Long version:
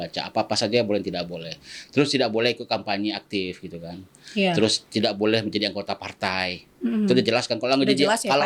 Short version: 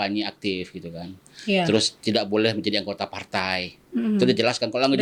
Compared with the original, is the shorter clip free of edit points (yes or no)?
yes